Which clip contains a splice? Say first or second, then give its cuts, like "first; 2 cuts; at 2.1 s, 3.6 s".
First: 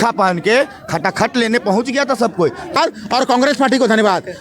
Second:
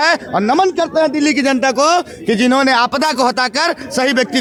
first; 1 cut; at 2.8 s